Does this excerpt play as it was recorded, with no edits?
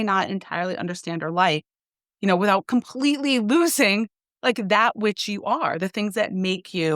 yes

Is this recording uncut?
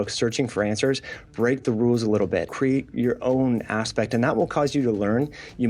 no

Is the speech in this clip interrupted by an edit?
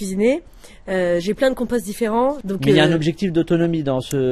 yes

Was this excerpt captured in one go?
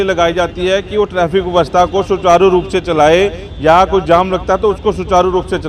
yes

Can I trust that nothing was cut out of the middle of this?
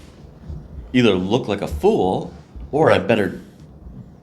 yes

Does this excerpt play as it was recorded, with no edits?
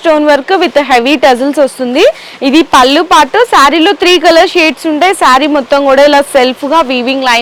yes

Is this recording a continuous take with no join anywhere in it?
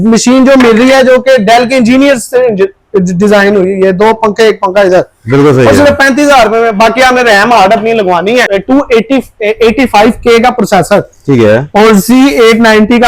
no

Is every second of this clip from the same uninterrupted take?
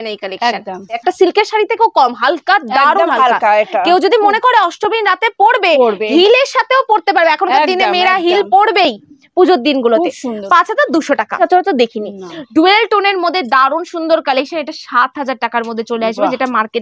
no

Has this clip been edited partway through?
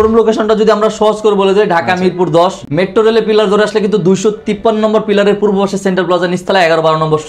no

